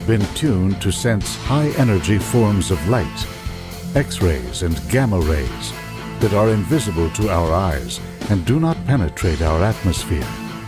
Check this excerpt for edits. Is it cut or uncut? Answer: cut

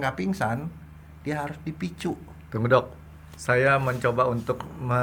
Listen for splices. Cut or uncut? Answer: uncut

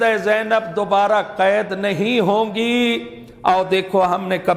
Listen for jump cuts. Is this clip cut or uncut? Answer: uncut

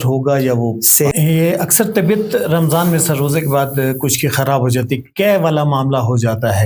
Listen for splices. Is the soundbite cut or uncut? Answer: cut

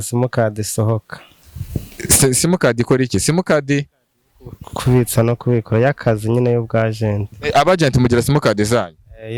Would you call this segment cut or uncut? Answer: uncut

